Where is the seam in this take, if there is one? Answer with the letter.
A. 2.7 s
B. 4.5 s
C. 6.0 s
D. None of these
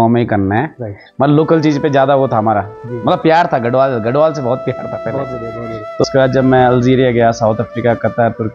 C